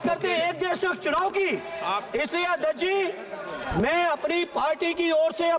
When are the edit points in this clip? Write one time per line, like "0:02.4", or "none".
none